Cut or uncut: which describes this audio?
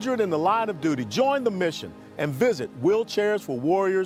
uncut